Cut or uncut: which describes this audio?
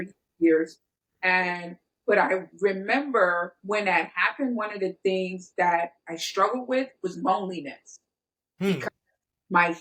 uncut